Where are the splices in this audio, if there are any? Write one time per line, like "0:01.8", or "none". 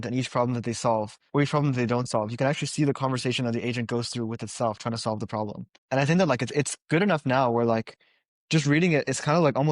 0:01.2
0:05.7